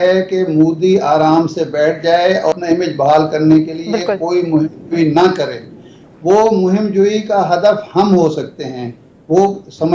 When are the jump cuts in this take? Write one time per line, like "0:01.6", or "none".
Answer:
none